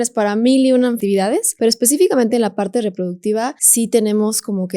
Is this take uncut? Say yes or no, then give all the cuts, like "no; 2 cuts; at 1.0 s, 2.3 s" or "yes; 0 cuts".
no; 2 cuts; at 1.1 s, 3.6 s